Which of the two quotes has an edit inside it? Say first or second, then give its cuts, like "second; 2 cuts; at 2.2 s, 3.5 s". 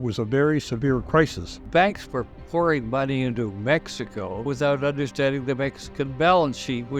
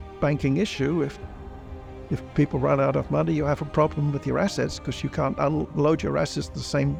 first; 1 cut; at 1.7 s